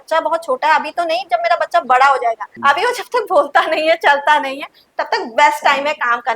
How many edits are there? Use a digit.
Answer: 1